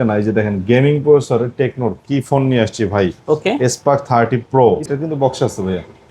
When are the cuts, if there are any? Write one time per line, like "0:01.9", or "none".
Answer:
0:04.9